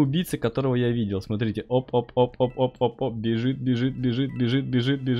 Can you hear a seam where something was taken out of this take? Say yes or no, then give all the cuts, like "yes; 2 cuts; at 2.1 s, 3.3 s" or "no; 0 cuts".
no; 0 cuts